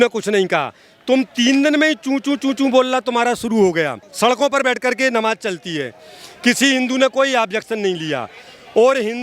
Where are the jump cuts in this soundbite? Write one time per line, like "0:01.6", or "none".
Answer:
0:04.0